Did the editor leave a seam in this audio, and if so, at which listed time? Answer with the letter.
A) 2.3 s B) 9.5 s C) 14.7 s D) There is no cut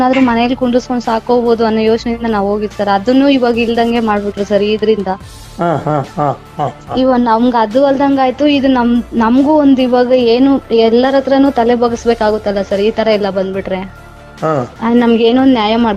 C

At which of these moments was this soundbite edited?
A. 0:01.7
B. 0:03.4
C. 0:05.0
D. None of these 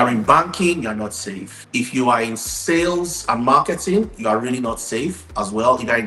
D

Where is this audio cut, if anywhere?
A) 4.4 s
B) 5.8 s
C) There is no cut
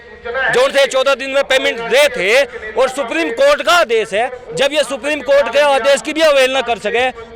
C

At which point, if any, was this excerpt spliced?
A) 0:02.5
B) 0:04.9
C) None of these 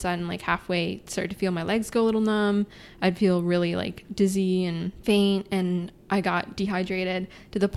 B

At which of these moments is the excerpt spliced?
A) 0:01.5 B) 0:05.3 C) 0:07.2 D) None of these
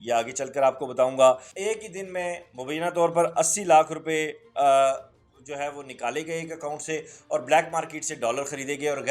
A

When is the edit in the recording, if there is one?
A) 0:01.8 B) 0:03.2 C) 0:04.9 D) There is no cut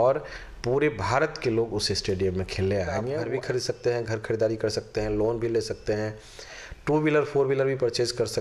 B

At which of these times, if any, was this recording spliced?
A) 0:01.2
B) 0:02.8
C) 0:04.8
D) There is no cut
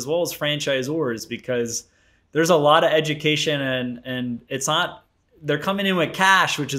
D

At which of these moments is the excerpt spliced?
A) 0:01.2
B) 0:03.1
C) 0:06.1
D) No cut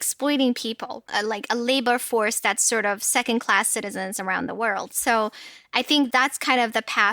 C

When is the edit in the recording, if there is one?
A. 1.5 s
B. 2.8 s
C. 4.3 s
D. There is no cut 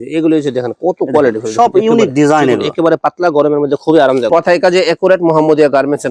C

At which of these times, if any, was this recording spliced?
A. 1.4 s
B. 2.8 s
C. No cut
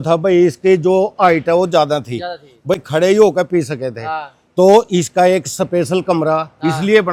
C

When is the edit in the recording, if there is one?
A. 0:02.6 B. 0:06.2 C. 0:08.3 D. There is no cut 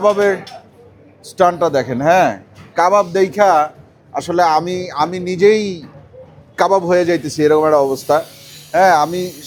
D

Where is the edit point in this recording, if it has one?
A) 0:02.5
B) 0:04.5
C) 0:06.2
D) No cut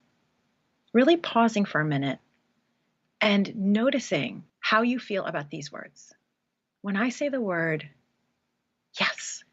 B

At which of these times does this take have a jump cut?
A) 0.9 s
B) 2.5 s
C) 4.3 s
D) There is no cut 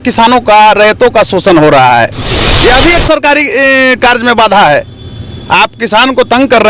B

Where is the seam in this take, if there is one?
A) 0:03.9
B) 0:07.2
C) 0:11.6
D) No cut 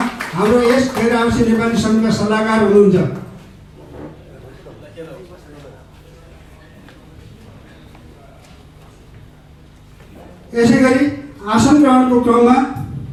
D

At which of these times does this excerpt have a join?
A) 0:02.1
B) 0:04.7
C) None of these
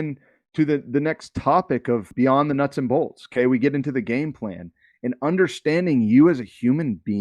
A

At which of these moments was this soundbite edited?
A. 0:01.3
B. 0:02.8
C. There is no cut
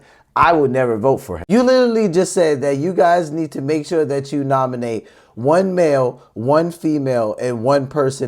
A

